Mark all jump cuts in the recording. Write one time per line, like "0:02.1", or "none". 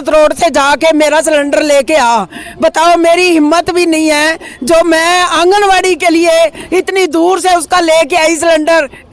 none